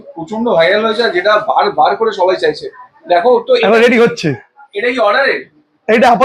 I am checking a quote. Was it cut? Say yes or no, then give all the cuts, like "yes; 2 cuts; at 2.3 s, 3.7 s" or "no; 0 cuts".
no; 0 cuts